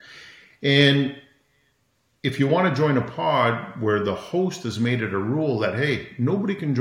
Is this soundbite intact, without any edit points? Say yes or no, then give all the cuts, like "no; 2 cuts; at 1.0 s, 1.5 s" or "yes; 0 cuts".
yes; 0 cuts